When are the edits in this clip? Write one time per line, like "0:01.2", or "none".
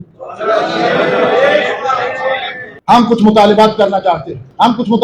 0:02.7